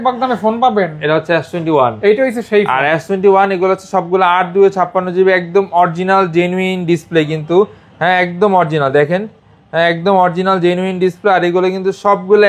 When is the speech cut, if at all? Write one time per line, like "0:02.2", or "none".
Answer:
none